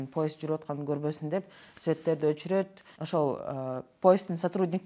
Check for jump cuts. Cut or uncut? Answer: uncut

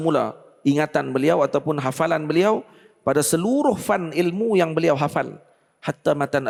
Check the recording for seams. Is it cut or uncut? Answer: uncut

